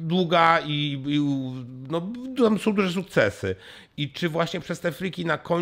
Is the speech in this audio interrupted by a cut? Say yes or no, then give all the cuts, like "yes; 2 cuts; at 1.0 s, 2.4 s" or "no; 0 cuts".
no; 0 cuts